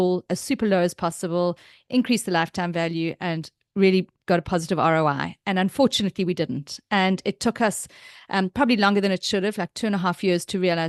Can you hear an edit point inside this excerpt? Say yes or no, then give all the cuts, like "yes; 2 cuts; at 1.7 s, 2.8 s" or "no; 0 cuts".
no; 0 cuts